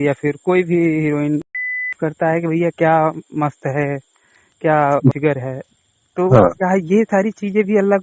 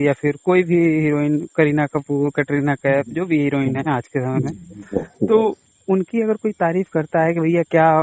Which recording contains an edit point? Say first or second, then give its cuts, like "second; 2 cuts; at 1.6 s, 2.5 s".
first; 2 cuts; at 1.6 s, 5.1 s